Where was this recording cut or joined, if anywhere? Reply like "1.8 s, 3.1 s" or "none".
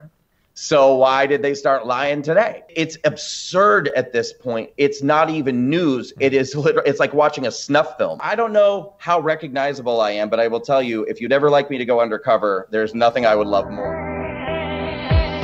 2.7 s, 8.2 s, 13.7 s